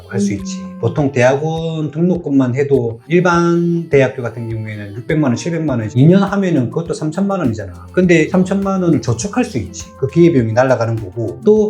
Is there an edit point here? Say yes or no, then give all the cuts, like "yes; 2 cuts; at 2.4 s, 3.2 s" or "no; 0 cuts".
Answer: yes; 2 cuts; at 3.0 s, 8.3 s